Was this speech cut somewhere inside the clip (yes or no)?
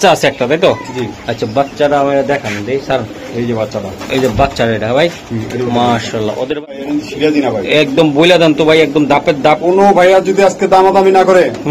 yes